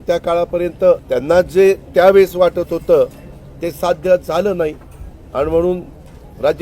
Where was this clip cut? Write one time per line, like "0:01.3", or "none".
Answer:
0:01.0